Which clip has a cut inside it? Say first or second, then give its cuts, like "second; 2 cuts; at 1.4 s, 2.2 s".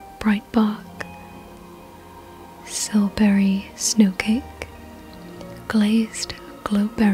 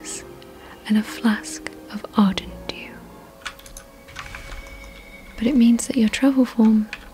second; 1 cut; at 3.3 s